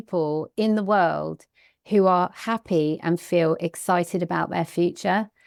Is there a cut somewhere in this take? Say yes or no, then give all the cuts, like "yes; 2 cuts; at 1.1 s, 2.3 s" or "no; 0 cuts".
no; 0 cuts